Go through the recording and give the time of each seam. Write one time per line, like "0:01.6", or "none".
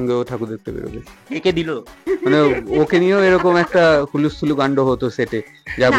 0:01.9